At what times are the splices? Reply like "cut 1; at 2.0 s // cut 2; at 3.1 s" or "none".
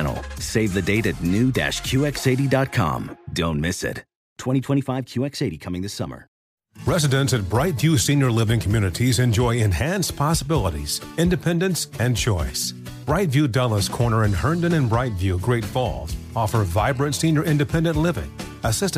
cut 1; at 6.4 s